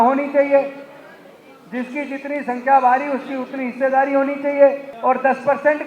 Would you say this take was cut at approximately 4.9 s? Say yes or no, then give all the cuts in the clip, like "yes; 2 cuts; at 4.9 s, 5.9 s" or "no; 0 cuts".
yes; 1 cut; at 4.9 s